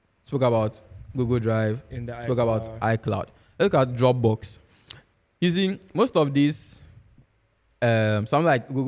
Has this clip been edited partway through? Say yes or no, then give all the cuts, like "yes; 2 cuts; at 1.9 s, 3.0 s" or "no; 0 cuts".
no; 0 cuts